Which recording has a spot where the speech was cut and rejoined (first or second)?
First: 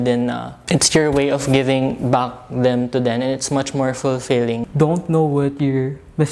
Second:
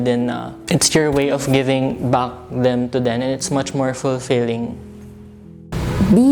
first